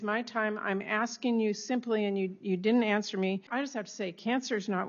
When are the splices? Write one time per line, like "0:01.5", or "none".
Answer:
0:03.5